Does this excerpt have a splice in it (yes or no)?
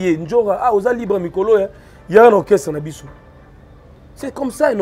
no